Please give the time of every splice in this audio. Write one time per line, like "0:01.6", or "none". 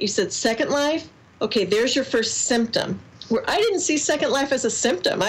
none